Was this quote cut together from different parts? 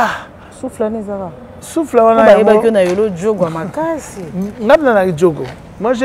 no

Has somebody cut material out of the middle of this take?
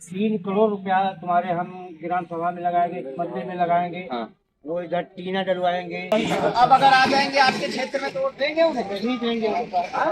yes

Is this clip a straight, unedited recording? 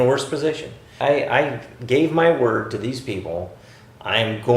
no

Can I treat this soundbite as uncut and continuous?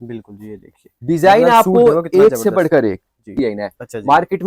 no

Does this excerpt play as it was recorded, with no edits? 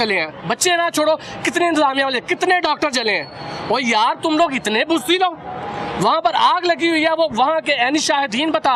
yes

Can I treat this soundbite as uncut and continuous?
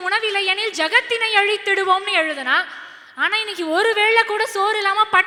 yes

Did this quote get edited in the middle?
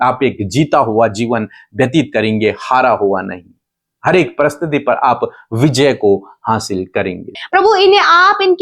yes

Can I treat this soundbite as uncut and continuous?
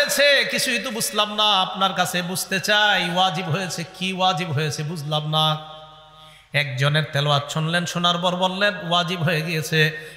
yes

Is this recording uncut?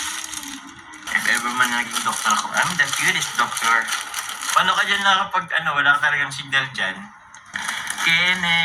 no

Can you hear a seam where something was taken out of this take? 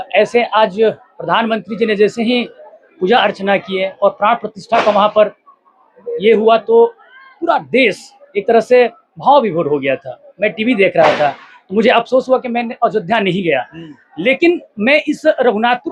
no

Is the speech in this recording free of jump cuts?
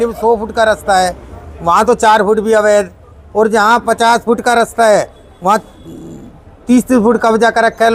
yes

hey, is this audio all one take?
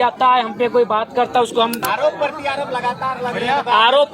no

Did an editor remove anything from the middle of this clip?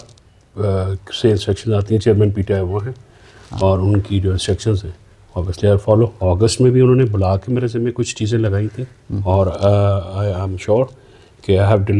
yes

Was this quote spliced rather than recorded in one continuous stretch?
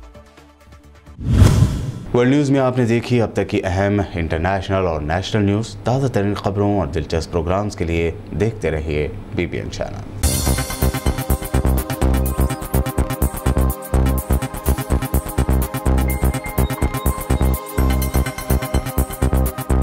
no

